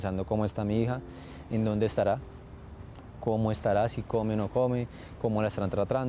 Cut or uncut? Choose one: uncut